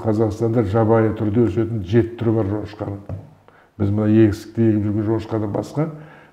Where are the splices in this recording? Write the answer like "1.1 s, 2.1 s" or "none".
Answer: none